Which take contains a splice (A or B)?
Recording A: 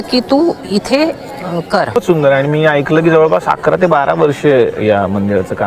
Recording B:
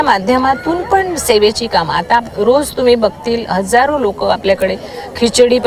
A